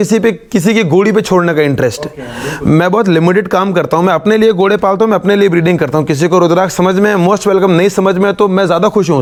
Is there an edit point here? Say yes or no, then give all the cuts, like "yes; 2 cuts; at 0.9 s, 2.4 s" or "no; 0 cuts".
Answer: no; 0 cuts